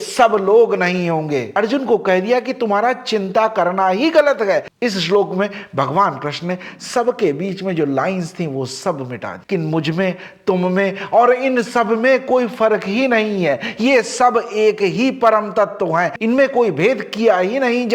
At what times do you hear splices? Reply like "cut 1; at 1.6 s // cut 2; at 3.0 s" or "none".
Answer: none